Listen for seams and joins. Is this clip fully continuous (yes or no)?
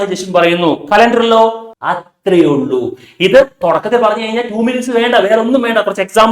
no